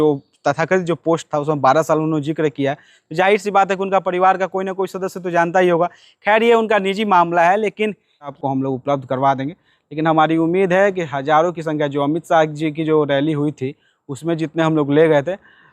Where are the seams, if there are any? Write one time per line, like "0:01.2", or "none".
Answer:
0:08.4